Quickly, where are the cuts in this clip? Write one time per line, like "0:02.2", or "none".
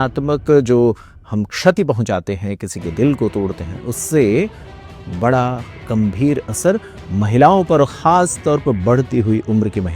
none